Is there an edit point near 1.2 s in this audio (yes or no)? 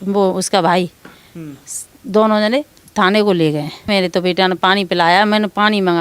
no